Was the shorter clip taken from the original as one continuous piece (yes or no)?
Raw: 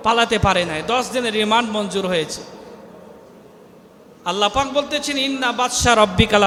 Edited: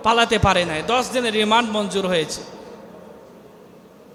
yes